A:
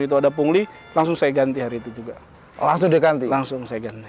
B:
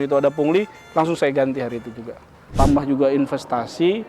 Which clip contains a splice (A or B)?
B